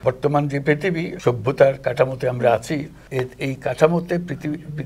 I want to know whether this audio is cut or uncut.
cut